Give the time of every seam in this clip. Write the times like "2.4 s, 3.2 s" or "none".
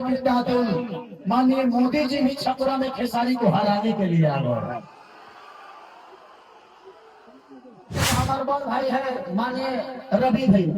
8.0 s